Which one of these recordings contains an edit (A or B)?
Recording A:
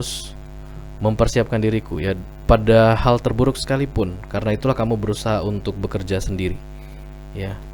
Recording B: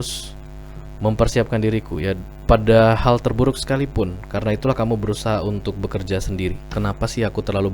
B